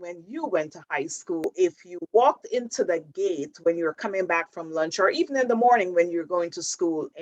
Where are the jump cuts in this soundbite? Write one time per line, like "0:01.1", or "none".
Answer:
0:01.4